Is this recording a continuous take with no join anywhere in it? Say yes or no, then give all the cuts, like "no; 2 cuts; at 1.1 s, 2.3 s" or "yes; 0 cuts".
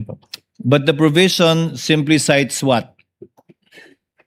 yes; 0 cuts